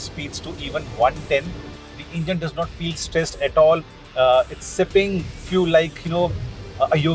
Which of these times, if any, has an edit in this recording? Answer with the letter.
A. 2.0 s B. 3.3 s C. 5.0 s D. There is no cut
A